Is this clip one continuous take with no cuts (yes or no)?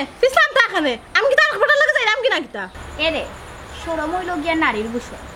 no